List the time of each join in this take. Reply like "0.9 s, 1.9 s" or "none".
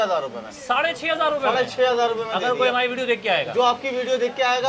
none